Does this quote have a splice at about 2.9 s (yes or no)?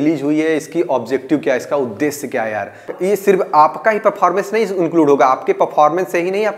yes